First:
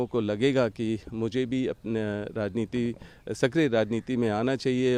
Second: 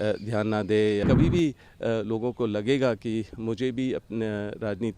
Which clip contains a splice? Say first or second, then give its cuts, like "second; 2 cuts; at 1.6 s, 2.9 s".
second; 1 cut; at 1.0 s